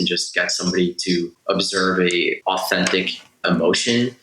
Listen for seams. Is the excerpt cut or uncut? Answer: cut